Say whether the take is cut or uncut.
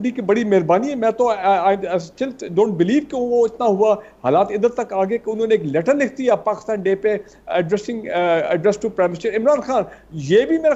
uncut